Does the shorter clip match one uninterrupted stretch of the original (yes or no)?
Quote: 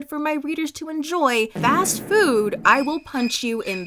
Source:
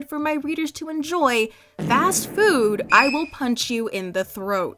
no